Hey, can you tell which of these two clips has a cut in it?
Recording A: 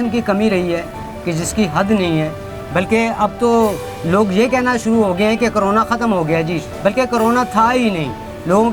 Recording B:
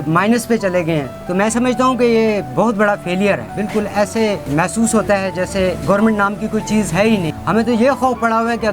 B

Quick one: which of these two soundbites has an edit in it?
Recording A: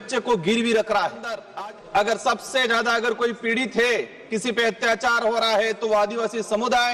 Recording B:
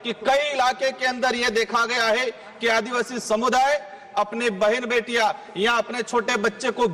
A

